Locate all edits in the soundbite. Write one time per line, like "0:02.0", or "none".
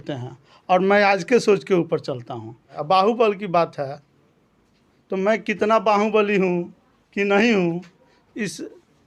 0:02.7